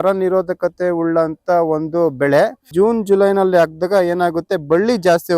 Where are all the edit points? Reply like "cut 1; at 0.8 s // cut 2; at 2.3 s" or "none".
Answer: cut 1; at 2.7 s